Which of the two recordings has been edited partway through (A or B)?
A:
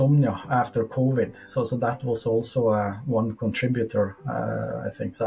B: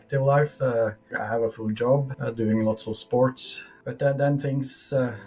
B